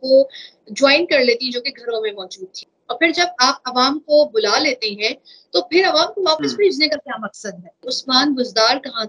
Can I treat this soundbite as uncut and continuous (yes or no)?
no